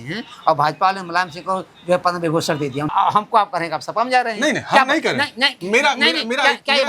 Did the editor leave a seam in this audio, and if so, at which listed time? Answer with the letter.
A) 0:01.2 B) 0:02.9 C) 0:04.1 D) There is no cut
B